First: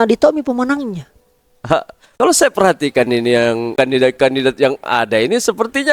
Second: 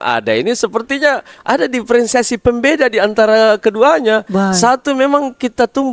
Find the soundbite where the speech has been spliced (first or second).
first